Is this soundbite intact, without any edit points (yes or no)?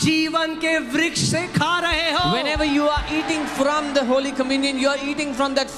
yes